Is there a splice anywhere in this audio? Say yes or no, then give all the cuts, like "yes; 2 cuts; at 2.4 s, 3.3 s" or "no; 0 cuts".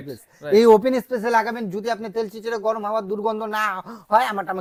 no; 0 cuts